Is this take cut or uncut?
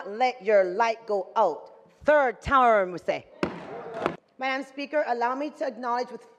cut